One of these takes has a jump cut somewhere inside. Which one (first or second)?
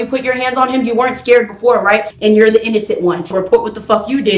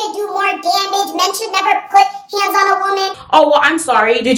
first